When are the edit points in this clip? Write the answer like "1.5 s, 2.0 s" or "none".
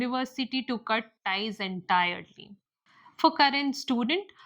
2.5 s